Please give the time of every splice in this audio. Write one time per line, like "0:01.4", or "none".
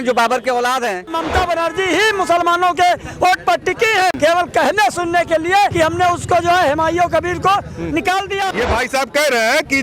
0:01.2
0:04.2
0:05.7
0:08.5